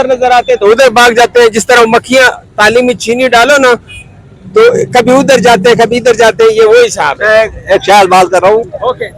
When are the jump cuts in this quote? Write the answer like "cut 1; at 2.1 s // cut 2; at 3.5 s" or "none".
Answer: none